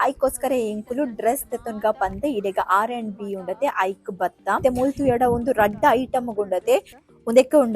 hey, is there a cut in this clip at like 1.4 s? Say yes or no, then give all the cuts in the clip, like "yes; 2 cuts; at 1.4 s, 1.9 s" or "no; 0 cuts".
no; 1 cut; at 4.6 s